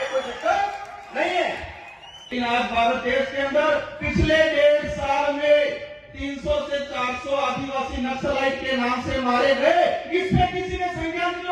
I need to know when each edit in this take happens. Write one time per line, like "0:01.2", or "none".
0:02.3